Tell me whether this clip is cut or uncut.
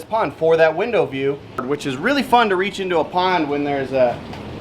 cut